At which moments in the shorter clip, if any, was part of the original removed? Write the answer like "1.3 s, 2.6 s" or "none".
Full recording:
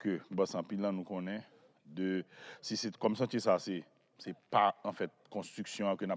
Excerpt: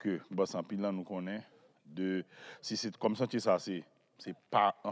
none